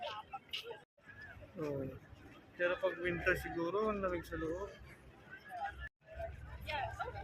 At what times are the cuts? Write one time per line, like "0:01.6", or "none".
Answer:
0:01.0
0:06.0